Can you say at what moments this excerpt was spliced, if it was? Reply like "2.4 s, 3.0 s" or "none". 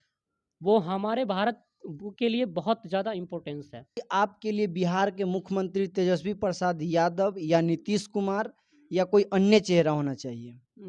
4.0 s